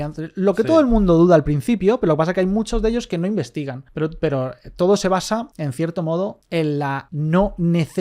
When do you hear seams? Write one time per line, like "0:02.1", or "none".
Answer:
0:03.8
0:05.5
0:06.7

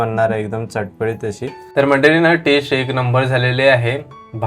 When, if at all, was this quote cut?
0:01.6

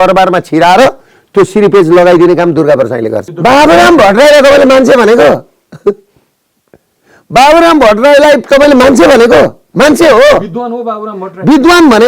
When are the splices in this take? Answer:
0:03.2

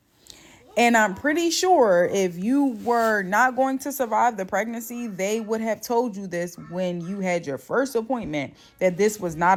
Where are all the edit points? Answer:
none

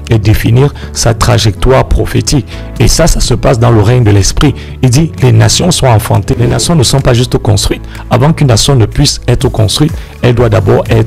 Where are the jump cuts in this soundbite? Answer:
0:06.4

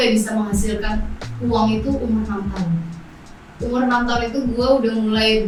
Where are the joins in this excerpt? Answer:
none

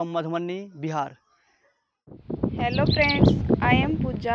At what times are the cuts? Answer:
0:02.1

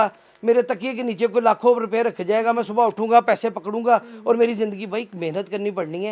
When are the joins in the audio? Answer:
none

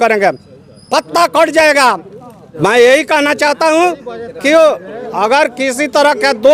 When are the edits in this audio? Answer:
none

